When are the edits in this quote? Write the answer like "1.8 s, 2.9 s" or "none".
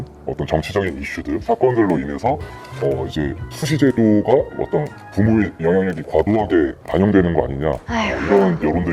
none